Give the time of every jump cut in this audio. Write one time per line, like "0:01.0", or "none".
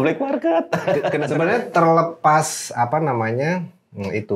0:01.2